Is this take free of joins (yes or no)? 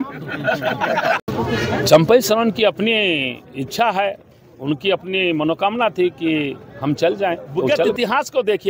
no